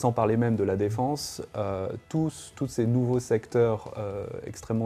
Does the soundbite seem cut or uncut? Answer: uncut